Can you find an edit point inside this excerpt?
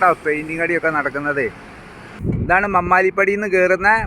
yes; 1 cut; at 2.2 s

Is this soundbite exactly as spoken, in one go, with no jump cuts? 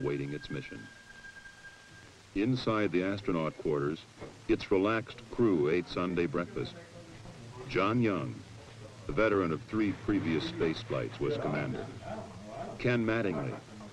yes; 0 cuts

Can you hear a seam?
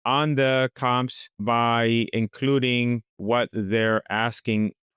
yes; 2 cuts; at 1.4 s, 3.1 s

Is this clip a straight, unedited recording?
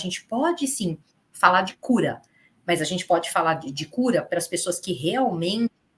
yes; 0 cuts

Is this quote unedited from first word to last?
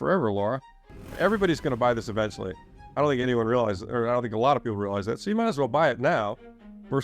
no; 1 cut; at 1.1 s

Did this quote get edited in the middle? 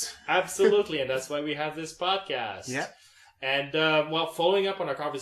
yes; 1 cut; at 3.7 s

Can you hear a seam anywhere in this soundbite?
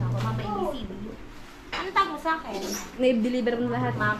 no; 0 cuts

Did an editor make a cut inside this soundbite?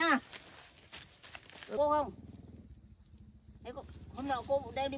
yes; 1 cut; at 1.8 s

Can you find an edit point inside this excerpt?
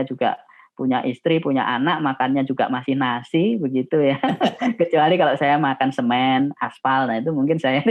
no; 0 cuts

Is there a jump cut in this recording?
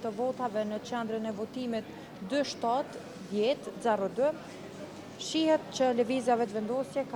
no; 0 cuts

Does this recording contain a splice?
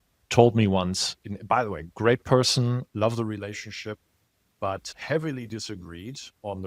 yes; 1 cut; at 4.8 s

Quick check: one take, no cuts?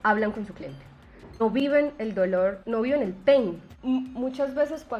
no; 3 cuts; at 1.4 s, 2.6 s, 3.7 s

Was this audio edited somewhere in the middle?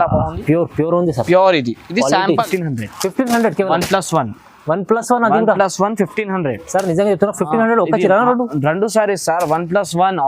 yes; 1 cut; at 2.5 s

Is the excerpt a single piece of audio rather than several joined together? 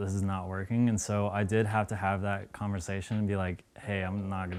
yes; 0 cuts

